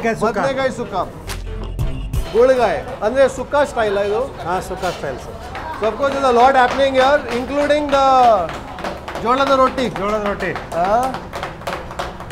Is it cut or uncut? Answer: uncut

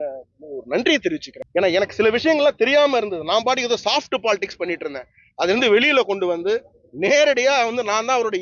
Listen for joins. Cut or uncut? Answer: cut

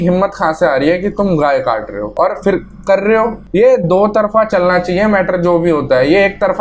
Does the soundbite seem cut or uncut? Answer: cut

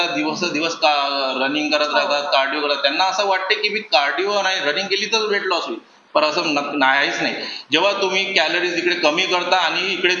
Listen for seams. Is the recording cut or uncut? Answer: uncut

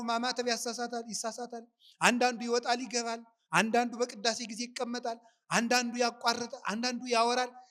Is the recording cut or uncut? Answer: uncut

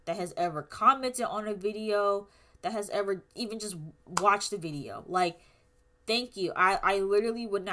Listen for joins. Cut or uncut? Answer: uncut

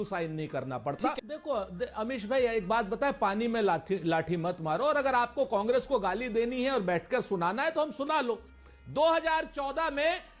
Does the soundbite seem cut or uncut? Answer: cut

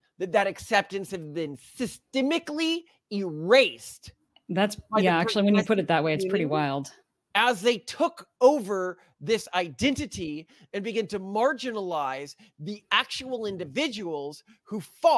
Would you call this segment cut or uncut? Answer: uncut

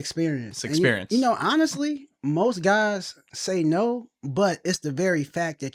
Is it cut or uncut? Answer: uncut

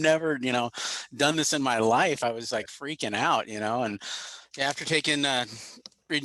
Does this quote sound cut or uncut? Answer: cut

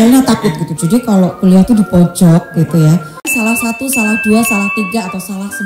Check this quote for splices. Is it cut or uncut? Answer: cut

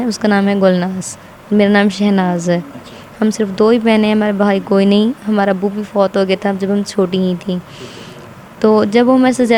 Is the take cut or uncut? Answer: uncut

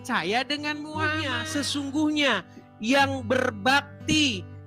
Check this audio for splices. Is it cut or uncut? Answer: cut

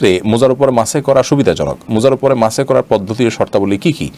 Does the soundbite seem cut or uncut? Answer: uncut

